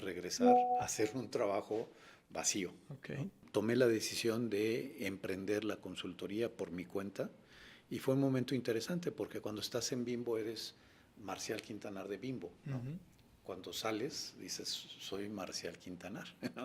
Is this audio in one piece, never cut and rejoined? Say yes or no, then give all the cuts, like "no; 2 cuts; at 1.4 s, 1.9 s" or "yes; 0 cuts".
no; 1 cut; at 3.4 s